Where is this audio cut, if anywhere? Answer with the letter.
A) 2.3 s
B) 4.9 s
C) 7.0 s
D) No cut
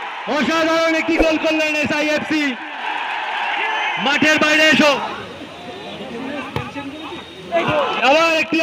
B